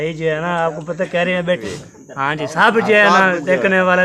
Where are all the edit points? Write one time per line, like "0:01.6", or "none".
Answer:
0:01.7

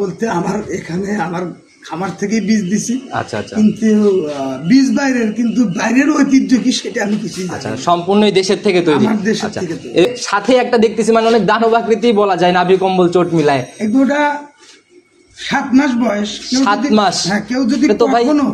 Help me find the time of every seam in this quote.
0:10.0

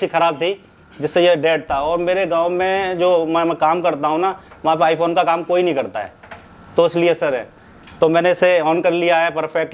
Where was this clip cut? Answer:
none

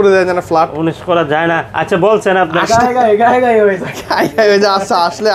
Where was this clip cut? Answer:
none

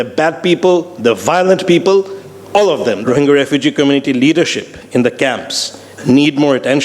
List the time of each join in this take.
0:03.0

